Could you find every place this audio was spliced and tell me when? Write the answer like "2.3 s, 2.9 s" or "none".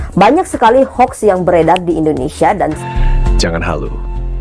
2.8 s